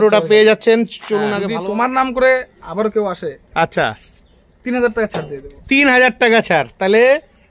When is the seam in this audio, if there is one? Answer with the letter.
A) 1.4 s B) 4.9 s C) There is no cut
A